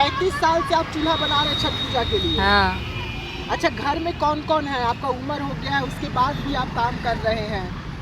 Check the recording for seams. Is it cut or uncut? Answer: uncut